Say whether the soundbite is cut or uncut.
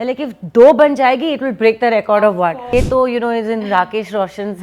cut